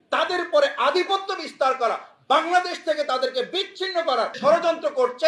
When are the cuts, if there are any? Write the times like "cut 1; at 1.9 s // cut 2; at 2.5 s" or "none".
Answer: cut 1; at 4.4 s